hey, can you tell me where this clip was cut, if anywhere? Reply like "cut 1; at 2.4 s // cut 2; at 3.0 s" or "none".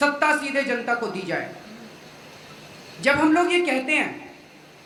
none